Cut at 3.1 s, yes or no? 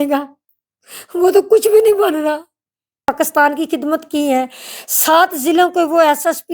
yes